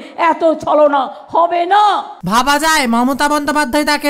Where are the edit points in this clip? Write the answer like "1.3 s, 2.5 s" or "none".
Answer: 2.1 s